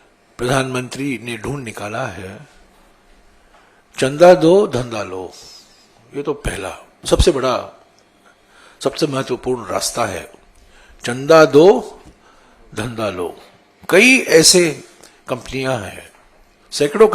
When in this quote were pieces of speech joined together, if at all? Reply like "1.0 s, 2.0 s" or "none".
none